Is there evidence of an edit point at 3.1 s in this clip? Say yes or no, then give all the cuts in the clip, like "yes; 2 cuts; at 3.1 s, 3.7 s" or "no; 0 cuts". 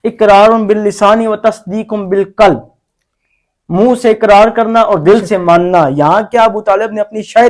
no; 0 cuts